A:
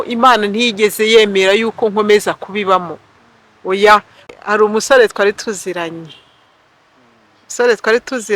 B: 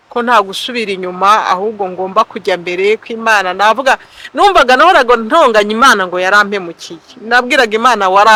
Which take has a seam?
A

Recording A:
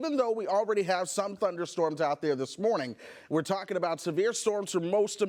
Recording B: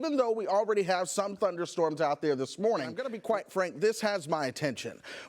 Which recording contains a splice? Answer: B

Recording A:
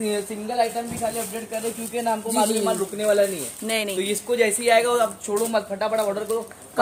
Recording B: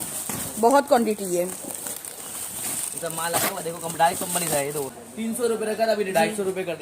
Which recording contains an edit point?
B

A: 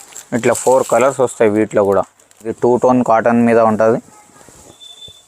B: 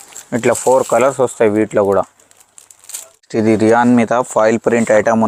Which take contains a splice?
A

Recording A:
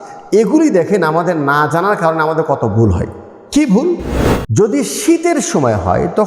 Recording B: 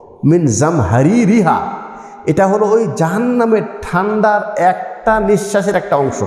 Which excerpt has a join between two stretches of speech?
A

